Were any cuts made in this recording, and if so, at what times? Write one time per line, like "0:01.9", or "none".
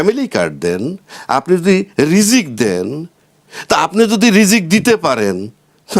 none

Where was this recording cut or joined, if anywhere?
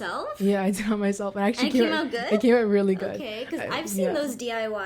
none

